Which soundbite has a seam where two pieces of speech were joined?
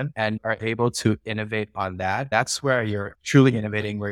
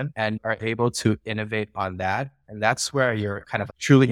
first; 2 cuts; at 2.3 s, 3.2 s

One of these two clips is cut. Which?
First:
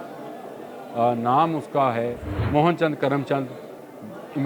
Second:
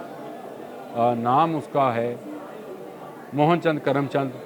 first; 1 cut; at 2.3 s

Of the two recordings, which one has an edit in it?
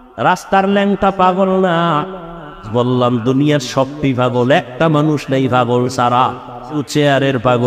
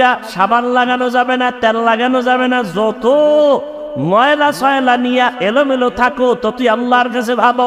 first; 2 cuts; at 2.6 s, 6.8 s

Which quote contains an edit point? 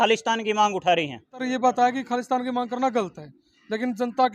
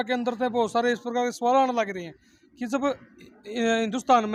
first; 1 cut; at 1.4 s

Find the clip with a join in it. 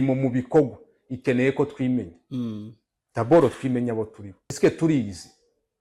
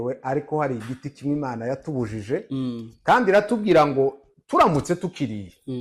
first; 1 cut; at 4.6 s

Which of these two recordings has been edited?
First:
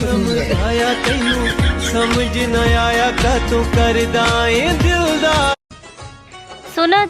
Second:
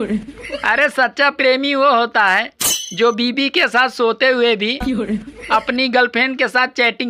first; 1 cut; at 5.7 s

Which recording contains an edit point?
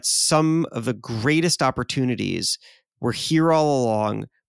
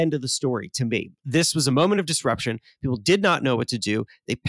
second; 1 cut; at 1.1 s

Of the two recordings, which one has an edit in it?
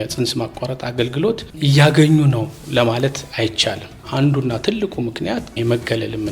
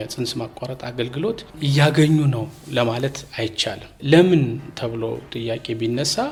first; 1 cut; at 3.9 s

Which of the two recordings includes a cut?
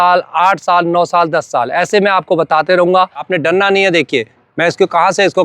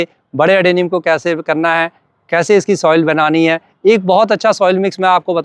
first; 1 cut; at 3.2 s

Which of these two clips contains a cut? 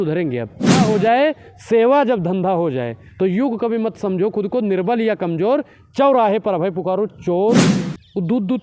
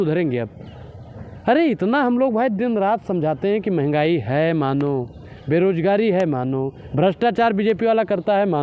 first; 2 cuts; at 0.8 s, 7.7 s

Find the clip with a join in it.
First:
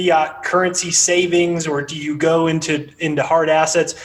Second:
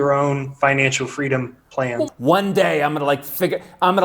second; 1 cut; at 2.1 s

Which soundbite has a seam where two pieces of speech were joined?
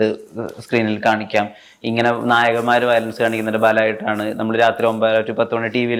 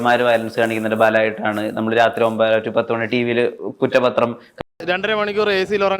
second; 1 cut; at 4.5 s

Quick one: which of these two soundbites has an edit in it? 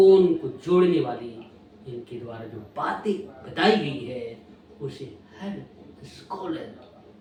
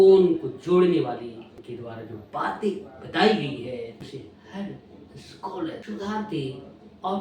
second; 3 cuts; at 1.6 s, 4.1 s, 5.8 s

